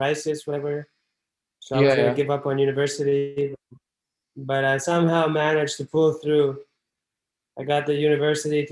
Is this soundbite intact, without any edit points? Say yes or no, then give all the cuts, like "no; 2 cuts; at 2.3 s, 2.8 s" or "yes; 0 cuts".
yes; 0 cuts